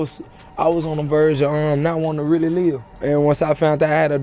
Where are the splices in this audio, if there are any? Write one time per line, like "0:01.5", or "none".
0:02.9